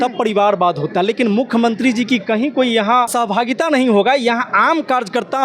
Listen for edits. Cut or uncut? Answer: cut